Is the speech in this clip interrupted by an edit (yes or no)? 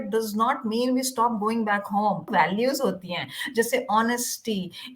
yes